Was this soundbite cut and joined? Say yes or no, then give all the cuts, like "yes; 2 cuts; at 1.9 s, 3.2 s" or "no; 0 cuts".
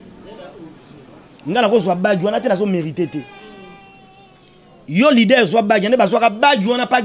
no; 0 cuts